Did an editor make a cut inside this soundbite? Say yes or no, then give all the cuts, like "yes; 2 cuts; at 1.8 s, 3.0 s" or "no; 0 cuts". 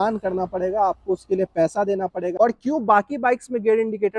yes; 1 cut; at 2.3 s